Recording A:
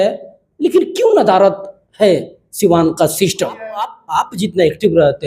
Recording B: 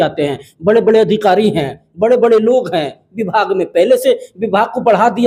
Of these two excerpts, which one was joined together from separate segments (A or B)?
A